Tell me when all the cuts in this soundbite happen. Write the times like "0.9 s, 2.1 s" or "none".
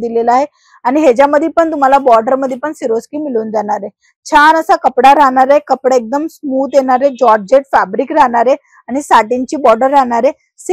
none